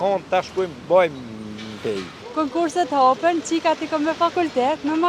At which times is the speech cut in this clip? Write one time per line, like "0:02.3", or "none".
0:02.1